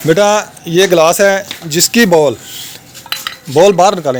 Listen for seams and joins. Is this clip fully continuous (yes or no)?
yes